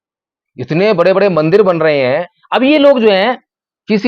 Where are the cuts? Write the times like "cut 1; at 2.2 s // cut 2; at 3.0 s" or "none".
cut 1; at 2.4 s

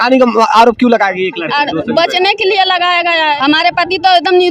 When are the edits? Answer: cut 1; at 3.4 s

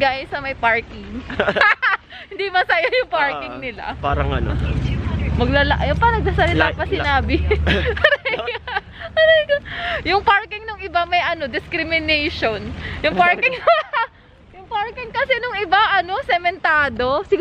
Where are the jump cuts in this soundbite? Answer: cut 1; at 4.0 s

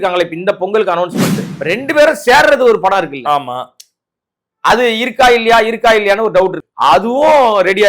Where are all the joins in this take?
cut 1; at 1.5 s // cut 2; at 6.6 s

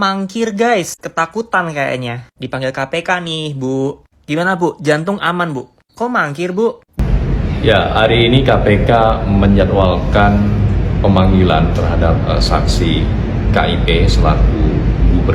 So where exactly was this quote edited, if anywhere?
cut 1; at 7.0 s

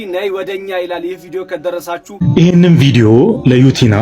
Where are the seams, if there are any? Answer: cut 1; at 2.1 s

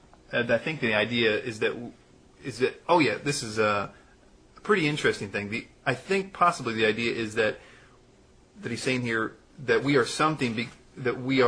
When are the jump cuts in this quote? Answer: cut 1; at 7.0 s

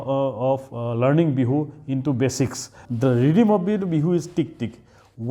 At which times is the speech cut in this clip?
cut 1; at 2.8 s

